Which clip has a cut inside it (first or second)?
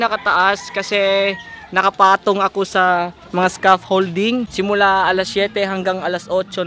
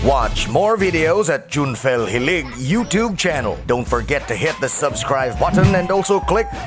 first